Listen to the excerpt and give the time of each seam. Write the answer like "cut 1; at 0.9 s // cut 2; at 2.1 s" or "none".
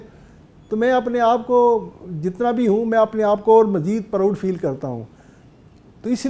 none